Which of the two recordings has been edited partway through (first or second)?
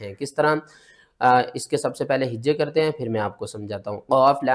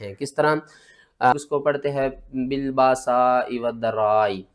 second